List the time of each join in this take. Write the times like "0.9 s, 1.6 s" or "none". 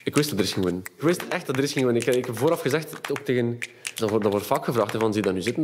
1.0 s